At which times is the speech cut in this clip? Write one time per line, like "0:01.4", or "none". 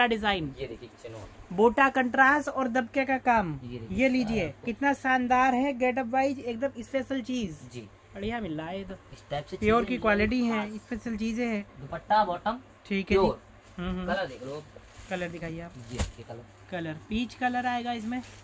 none